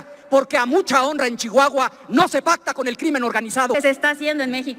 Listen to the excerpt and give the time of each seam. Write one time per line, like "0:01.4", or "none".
0:03.7